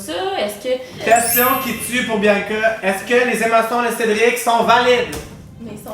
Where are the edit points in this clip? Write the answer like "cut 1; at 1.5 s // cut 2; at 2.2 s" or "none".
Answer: cut 1; at 0.9 s